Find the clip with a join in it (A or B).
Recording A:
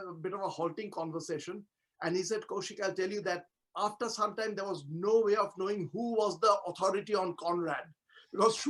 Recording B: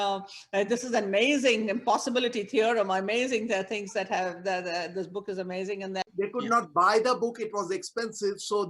B